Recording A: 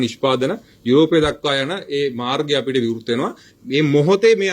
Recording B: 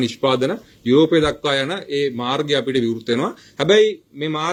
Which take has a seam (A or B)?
A